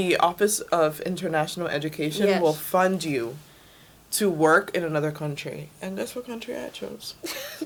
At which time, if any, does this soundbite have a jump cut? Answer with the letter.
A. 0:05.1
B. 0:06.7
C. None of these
C